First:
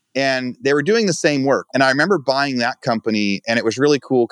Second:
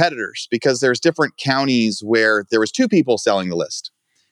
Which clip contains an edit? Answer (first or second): first